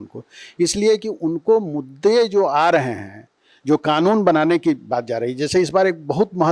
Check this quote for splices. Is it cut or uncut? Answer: uncut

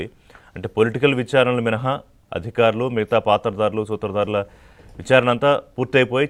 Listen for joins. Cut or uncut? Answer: uncut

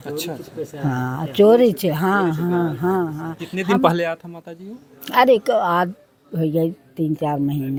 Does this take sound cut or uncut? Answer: uncut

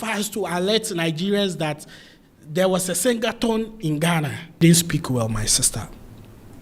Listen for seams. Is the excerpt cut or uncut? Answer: cut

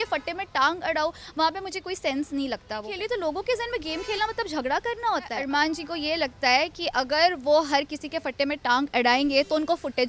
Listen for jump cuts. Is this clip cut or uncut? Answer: cut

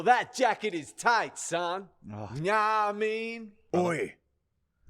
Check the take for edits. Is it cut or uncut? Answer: cut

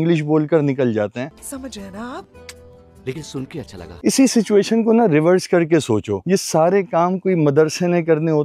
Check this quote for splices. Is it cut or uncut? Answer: cut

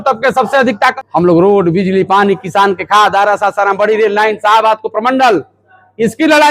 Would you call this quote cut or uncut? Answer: cut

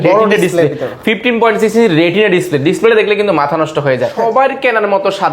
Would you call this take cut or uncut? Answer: cut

